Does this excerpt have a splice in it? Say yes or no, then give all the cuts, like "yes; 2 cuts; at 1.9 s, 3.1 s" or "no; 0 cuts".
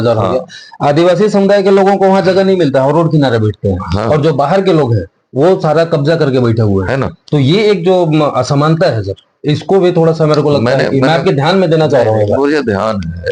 no; 0 cuts